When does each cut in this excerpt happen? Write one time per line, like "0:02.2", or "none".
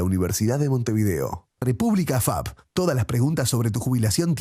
0:01.5